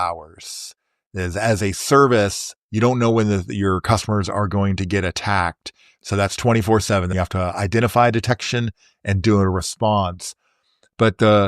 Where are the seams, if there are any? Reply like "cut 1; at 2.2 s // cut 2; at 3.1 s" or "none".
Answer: cut 1; at 5.9 s // cut 2; at 7.1 s